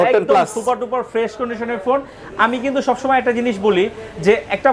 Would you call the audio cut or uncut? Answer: uncut